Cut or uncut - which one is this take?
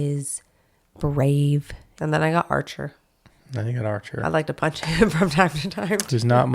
cut